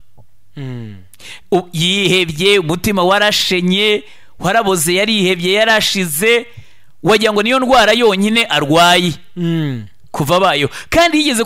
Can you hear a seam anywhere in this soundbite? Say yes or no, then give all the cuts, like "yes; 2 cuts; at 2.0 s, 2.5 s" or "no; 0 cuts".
no; 0 cuts